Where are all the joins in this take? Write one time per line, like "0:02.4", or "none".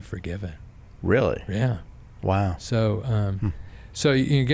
none